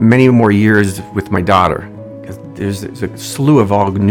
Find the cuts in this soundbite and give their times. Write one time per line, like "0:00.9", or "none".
none